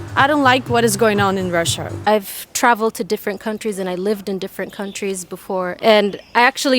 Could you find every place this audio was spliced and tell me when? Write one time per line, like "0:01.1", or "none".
0:01.9
0:05.7